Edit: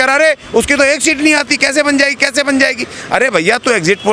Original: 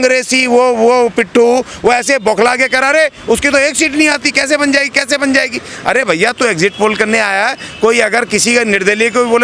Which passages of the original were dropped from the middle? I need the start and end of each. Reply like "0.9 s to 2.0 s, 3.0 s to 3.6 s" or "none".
none